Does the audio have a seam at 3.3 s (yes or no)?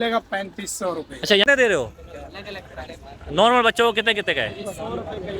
no